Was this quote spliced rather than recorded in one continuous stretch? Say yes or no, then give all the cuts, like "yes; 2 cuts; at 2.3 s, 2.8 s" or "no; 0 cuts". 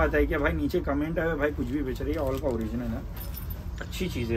no; 0 cuts